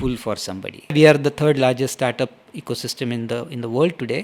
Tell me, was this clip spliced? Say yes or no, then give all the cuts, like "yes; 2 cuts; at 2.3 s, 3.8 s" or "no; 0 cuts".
yes; 1 cut; at 0.9 s